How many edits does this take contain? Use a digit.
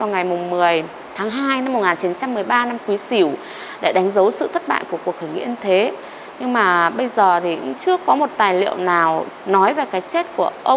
2